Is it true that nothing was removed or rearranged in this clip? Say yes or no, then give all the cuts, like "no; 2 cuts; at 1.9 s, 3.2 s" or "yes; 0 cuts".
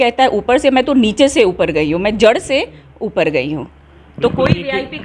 yes; 0 cuts